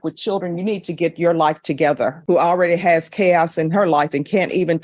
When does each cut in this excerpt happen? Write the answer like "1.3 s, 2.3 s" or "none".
2.2 s